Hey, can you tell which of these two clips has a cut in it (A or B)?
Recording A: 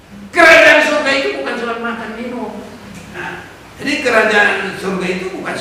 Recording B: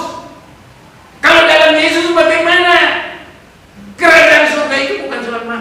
A